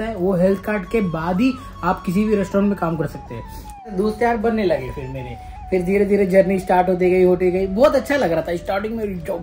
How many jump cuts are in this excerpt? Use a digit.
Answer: 1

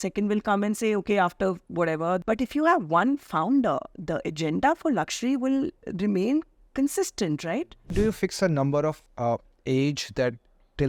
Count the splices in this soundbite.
3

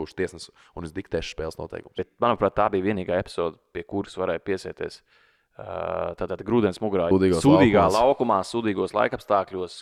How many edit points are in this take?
2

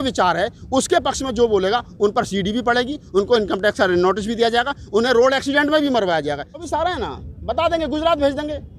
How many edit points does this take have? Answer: 1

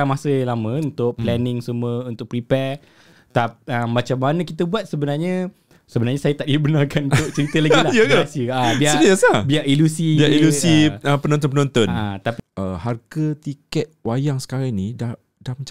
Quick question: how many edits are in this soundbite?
1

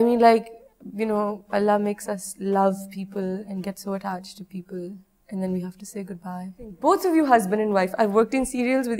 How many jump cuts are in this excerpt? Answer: 1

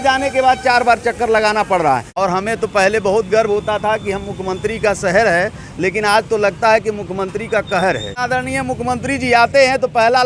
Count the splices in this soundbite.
2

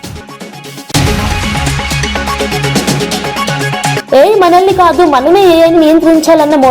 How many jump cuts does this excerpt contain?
2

